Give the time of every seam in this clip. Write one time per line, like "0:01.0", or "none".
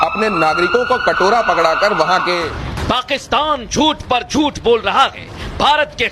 0:02.5